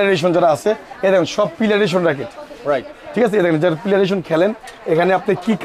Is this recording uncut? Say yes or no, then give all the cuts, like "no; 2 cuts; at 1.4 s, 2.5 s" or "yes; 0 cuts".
yes; 0 cuts